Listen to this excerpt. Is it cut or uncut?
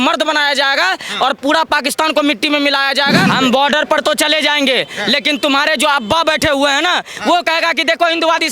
cut